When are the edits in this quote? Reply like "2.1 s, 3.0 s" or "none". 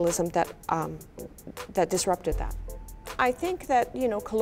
3.1 s